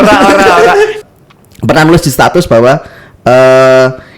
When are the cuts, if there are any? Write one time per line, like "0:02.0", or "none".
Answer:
0:01.0